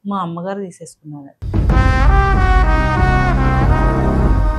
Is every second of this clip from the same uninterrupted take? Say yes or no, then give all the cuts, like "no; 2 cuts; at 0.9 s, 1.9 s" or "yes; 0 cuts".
yes; 0 cuts